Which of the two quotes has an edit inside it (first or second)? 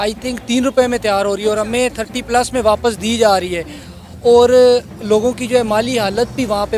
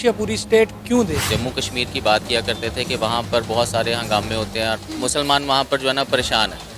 second